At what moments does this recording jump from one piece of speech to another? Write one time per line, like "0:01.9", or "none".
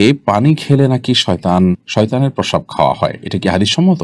none